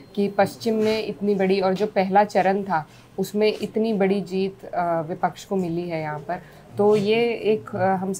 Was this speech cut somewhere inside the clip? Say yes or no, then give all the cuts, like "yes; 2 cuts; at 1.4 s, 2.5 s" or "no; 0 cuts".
no; 0 cuts